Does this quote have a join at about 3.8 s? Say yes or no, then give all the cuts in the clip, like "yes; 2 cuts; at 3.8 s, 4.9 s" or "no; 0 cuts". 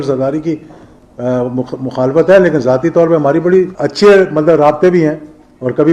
yes; 1 cut; at 3.8 s